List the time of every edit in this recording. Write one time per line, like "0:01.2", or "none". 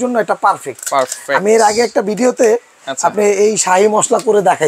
none